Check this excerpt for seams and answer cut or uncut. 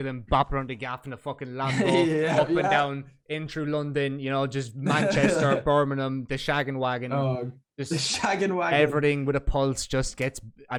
uncut